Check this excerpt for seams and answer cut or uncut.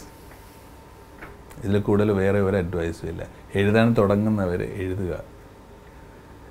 uncut